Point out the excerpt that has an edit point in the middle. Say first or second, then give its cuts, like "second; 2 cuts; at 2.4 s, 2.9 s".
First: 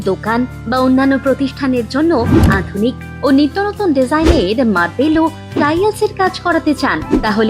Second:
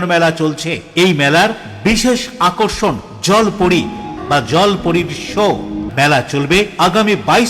second; 2 cuts; at 4.2 s, 5.9 s